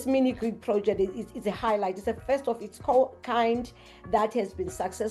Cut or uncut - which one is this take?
uncut